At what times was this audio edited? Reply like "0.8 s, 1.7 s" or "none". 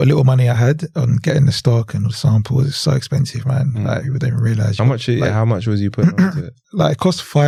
none

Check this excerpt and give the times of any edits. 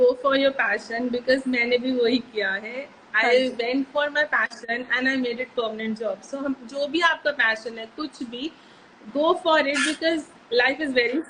none

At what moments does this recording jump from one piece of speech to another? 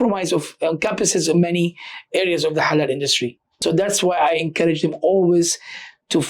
3.4 s

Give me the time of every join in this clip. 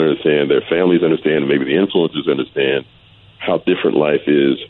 none

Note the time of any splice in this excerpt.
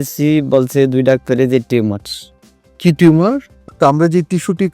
3.6 s

